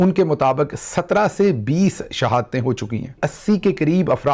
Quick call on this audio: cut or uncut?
cut